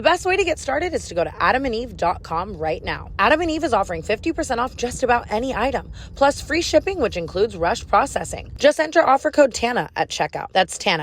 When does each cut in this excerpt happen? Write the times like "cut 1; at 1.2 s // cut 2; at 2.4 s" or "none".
cut 1; at 3.0 s // cut 2; at 8.4 s